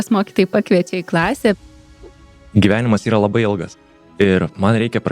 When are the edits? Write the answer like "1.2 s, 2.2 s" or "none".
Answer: 2.2 s